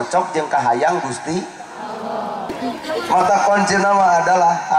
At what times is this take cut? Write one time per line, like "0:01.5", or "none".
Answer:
0:02.5